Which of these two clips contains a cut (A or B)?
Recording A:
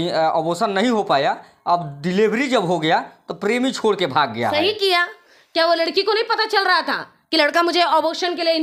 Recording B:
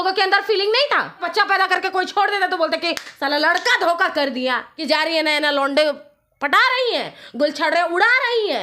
B